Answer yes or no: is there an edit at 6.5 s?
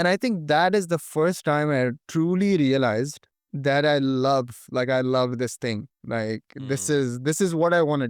no